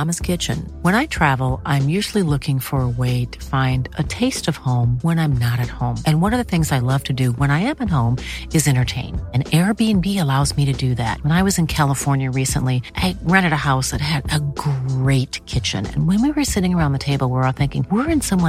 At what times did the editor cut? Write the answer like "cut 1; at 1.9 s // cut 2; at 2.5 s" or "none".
none